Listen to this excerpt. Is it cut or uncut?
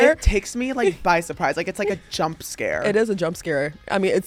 uncut